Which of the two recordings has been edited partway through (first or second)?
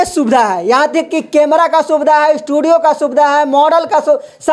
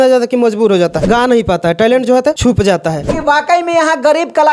second